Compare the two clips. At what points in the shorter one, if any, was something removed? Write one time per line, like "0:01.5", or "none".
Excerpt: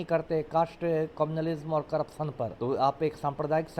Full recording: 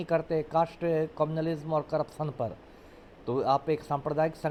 0:02.5